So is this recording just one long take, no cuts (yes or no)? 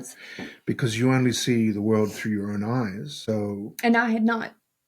no